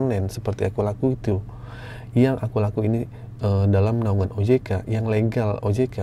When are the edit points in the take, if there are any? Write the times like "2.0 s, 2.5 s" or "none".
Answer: none